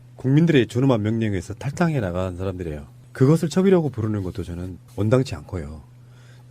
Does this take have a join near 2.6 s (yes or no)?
yes